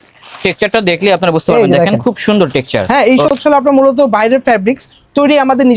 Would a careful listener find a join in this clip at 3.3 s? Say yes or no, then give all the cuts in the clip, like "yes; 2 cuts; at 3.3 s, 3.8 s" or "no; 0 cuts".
yes; 1 cut; at 3.3 s